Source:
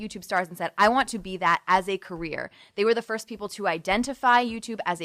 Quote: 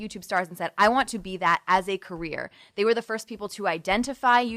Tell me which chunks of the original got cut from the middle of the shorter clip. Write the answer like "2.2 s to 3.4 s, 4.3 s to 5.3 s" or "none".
none